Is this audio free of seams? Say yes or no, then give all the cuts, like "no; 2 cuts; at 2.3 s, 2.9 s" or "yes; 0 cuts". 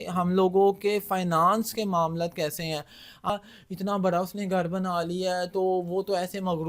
no; 1 cut; at 3.3 s